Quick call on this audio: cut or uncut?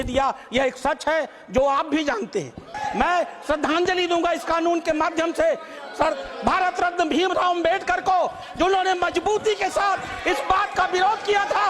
cut